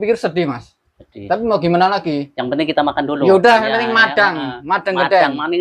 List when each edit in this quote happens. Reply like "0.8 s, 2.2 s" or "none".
none